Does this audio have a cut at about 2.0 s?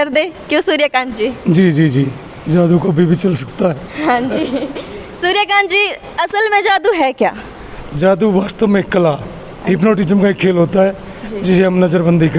no; 0 cuts

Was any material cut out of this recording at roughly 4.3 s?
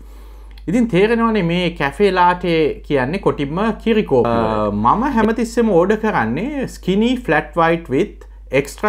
yes; 1 cut; at 4.3 s

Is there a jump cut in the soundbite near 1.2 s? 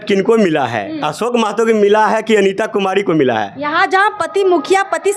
no; 0 cuts

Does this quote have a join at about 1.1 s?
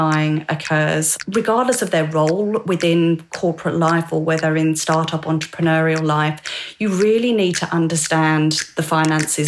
yes; 1 cut; at 1.1 s

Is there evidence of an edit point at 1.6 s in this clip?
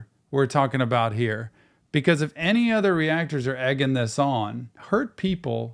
no; 1 cut; at 4.7 s

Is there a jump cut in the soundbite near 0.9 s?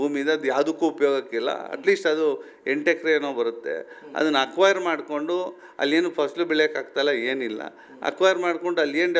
no; 0 cuts

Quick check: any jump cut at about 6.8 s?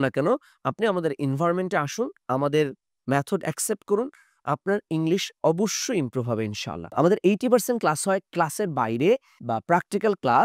yes; 1 cut; at 6.8 s

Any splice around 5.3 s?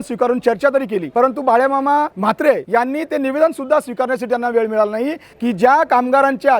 yes; 3 cuts; at 1.1 s, 2.5 s, 5.3 s

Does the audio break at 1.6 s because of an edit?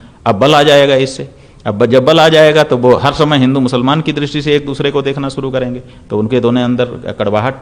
no; 0 cuts

